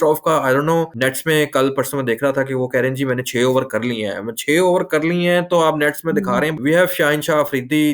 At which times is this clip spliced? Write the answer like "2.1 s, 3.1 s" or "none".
0.9 s, 6.6 s